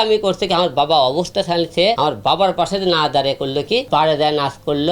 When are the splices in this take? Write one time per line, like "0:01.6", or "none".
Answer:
0:02.0
0:03.8